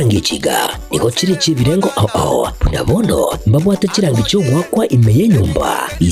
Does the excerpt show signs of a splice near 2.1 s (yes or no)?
yes